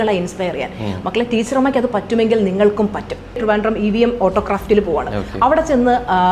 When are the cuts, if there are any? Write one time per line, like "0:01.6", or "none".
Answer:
0:03.4